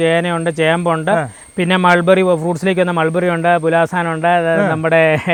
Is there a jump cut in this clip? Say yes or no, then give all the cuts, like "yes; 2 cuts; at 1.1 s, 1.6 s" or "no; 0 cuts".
no; 0 cuts